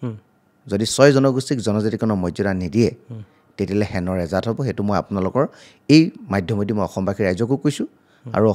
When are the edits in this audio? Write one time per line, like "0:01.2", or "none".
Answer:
none